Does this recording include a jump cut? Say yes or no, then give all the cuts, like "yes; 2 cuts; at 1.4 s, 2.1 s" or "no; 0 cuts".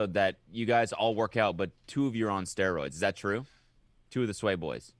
no; 0 cuts